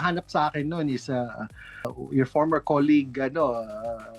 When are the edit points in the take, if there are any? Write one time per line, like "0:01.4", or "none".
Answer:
0:01.9